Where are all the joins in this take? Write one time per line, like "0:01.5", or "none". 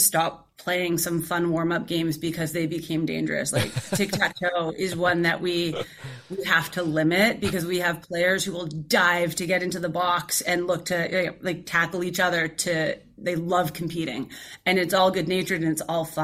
none